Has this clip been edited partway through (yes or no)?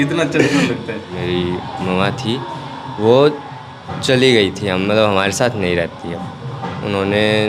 yes